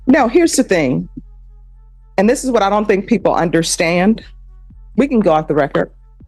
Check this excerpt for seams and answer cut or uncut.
uncut